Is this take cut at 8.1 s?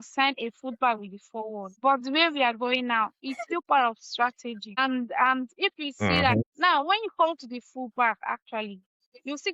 no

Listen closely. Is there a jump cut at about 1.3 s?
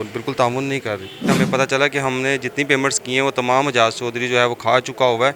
yes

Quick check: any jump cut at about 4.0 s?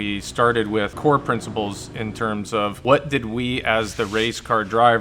no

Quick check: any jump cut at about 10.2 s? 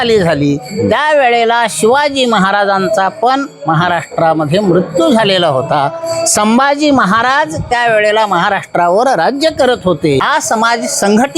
yes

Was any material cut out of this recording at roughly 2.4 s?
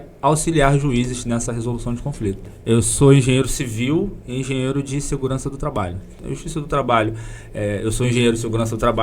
yes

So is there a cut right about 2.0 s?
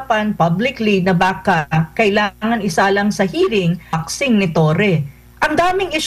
no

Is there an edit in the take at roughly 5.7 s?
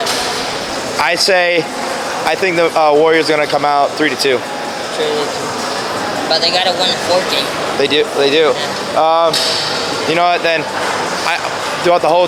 no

